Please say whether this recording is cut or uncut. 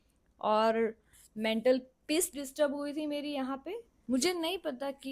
cut